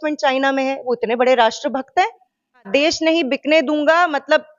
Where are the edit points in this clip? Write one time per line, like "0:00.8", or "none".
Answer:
0:02.7